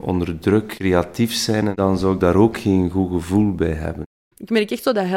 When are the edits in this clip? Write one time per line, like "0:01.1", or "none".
0:01.7
0:04.0